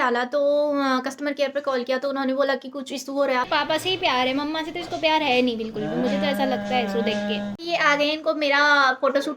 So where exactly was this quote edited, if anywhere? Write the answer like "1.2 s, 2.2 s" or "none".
3.5 s, 7.6 s